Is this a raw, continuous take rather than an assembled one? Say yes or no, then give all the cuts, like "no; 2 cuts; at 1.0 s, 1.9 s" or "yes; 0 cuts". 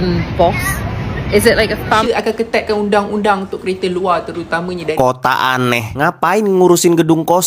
no; 2 cuts; at 2.0 s, 4.9 s